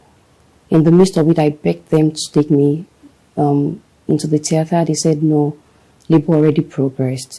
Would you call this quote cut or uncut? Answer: uncut